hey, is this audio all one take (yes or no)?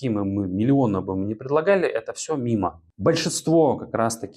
no